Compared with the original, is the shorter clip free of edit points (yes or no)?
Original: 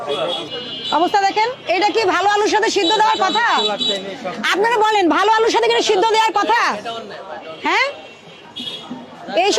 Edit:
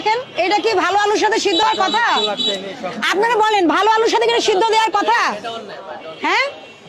no